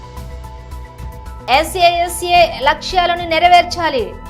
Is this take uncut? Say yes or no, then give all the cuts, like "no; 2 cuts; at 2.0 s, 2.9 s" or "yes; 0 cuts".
yes; 0 cuts